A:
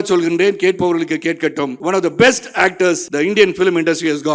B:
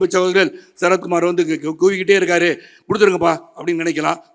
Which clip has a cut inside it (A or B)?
A